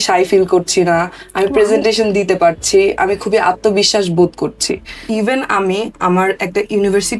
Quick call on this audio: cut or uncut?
cut